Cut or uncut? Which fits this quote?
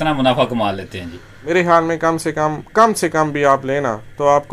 uncut